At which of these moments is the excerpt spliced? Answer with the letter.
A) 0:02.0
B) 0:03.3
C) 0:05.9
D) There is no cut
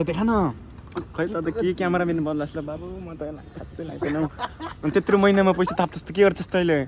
D